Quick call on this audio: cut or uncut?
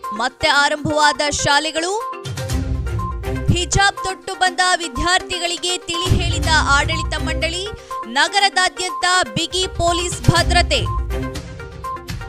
uncut